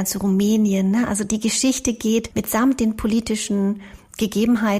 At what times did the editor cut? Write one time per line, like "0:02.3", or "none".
0:01.2
0:02.3